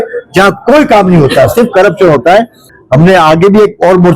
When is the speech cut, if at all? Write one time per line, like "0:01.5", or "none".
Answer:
0:02.7